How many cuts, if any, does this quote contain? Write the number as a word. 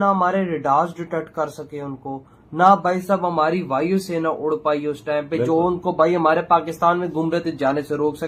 zero